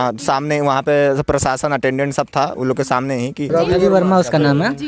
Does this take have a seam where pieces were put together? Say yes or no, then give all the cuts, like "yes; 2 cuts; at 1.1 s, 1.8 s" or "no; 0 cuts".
yes; 1 cut; at 3.5 s